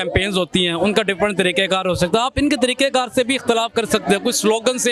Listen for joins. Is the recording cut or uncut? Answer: uncut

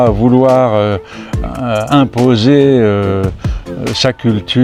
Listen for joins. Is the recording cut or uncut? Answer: uncut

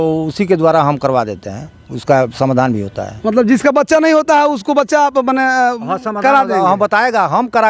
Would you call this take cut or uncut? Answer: uncut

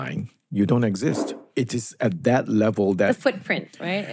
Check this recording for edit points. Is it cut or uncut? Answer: cut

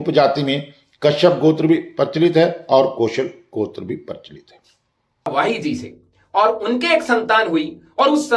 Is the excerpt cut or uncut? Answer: cut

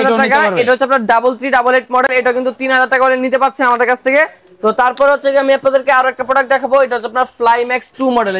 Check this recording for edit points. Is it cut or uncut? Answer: uncut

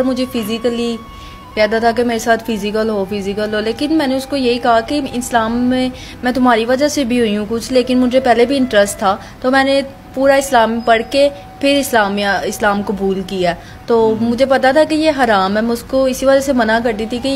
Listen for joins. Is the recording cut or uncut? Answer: uncut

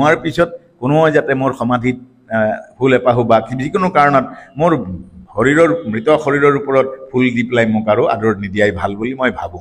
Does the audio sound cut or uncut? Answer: uncut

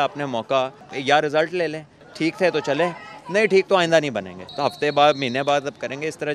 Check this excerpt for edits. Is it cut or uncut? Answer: cut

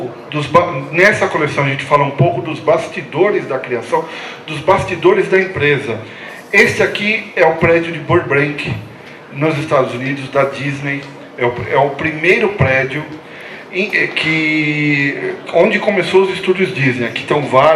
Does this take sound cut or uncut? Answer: uncut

